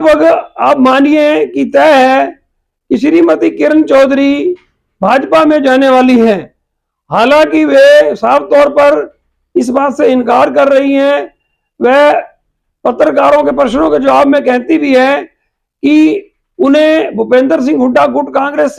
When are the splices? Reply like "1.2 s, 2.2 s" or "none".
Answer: none